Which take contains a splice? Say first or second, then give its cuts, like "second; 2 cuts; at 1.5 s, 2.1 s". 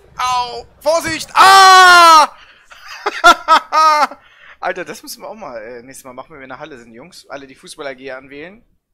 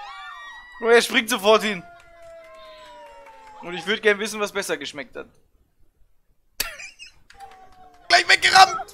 second; 1 cut; at 8.0 s